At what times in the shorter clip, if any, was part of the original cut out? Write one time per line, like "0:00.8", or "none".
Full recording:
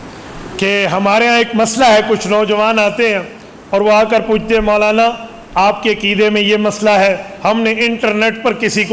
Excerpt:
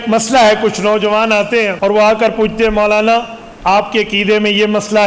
0:01.7